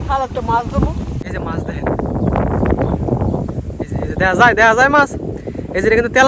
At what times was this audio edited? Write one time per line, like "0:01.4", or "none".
0:01.2